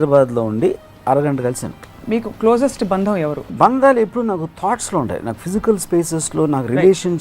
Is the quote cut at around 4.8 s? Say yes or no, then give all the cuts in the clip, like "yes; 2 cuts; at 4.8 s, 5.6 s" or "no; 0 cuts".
no; 2 cuts; at 1.9 s, 3.5 s